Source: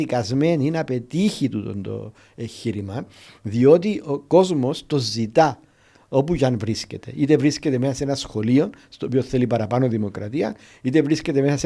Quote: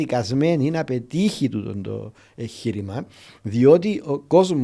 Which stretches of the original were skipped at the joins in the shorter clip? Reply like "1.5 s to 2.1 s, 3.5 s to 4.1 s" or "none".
none

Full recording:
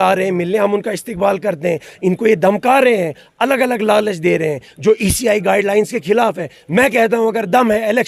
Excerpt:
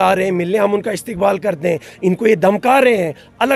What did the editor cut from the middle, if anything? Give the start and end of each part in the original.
none

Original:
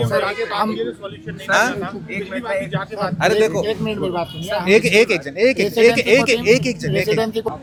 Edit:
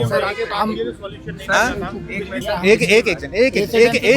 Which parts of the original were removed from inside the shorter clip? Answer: 2.3 s to 4.4 s

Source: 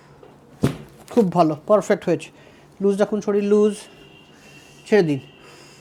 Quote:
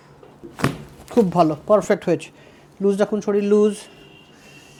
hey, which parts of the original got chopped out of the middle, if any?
none

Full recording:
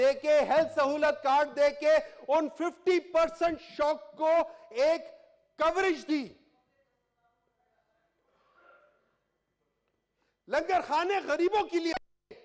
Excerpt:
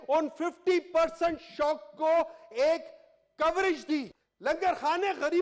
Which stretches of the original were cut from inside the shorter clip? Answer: 6.4 s to 10.3 s

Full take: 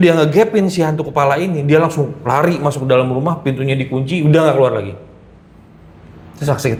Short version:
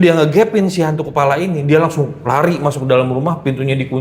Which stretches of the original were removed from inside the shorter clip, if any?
none

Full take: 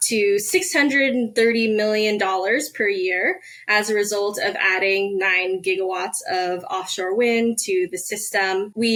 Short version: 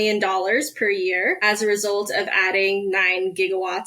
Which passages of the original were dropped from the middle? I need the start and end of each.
3.4 s to 3.7 s

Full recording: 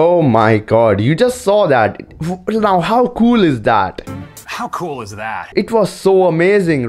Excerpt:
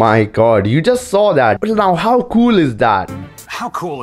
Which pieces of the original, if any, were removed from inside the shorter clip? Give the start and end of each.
1.9 s to 2.5 s, 3.9 s to 4.1 s

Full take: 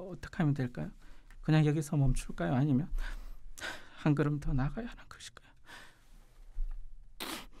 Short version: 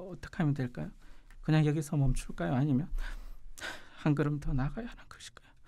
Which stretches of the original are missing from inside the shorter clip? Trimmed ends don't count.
none

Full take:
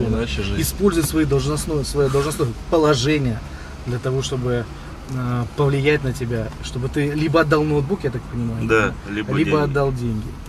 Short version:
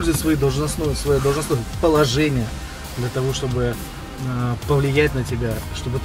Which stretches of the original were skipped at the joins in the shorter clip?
none

